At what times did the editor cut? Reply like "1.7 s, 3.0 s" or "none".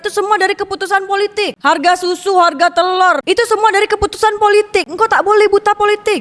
none